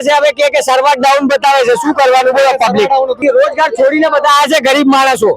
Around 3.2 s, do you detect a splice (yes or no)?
yes